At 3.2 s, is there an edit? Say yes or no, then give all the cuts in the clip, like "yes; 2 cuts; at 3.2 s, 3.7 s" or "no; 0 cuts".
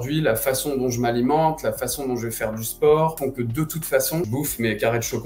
yes; 2 cuts; at 3.2 s, 4.3 s